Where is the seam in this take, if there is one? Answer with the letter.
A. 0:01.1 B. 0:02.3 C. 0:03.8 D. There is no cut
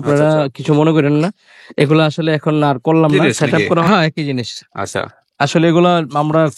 C